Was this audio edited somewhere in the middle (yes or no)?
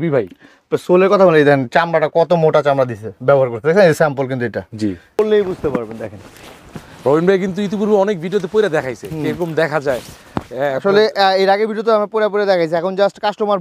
yes